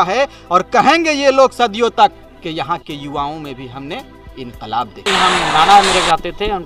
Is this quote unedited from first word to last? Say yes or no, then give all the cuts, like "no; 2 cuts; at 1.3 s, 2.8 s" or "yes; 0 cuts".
no; 1 cut; at 5.1 s